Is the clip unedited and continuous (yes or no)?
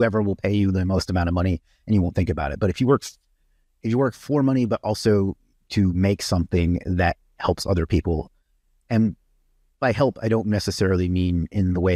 yes